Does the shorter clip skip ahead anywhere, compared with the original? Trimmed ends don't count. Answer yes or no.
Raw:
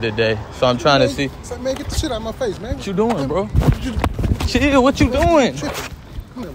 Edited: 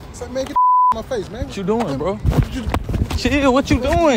no